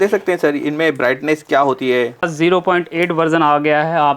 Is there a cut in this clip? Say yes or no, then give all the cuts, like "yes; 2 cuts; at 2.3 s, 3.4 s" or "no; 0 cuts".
yes; 1 cut; at 2.3 s